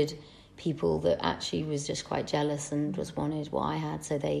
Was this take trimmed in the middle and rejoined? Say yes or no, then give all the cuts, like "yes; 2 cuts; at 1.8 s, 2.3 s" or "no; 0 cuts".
no; 0 cuts